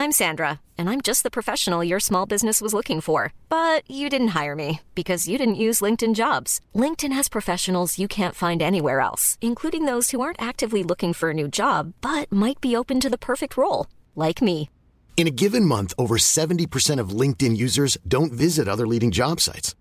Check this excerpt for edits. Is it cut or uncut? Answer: uncut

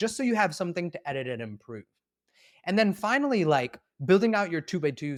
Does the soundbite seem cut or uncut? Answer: uncut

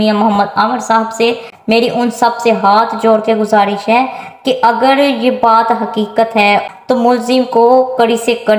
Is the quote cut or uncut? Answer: cut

